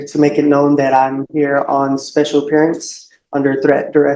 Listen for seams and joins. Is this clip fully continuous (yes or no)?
yes